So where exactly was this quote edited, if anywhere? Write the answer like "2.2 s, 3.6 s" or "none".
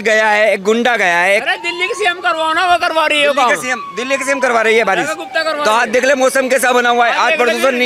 none